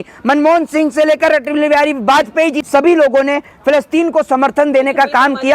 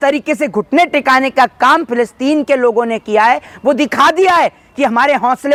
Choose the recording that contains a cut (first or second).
first